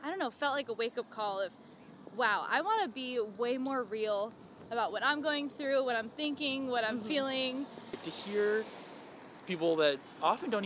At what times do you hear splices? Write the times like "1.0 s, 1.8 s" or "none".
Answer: 8.0 s